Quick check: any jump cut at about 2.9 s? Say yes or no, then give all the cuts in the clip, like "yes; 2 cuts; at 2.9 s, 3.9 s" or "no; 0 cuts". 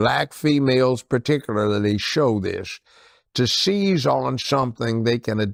no; 0 cuts